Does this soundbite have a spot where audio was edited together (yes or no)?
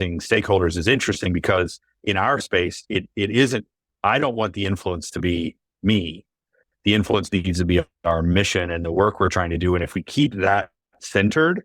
no